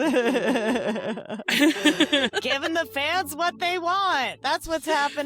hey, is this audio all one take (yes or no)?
no